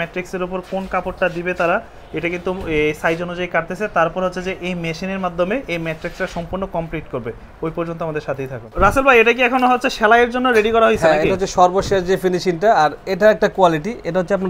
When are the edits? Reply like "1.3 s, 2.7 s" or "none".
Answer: none

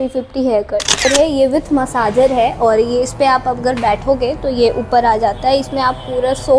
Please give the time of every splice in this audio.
1.1 s

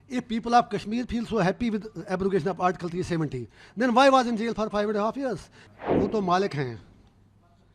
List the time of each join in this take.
5.6 s

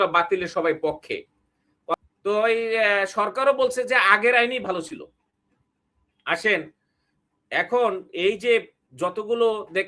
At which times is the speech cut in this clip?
1.9 s

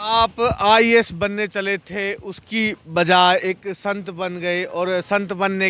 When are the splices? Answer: none

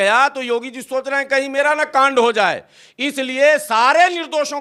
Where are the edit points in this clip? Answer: none

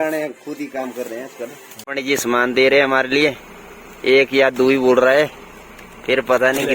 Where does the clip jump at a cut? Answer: 1.7 s

